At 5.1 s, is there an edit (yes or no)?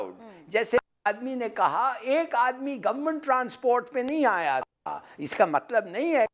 no